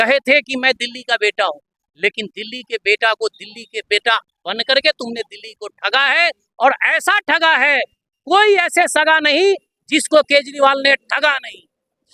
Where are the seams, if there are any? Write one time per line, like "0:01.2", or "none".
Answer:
none